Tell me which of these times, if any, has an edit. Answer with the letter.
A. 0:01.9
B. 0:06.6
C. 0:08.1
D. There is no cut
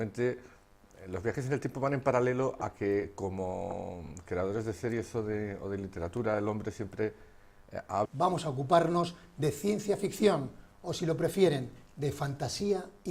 D